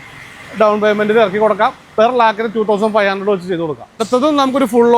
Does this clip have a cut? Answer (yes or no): yes